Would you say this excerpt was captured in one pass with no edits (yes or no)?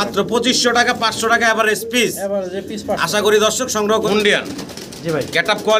no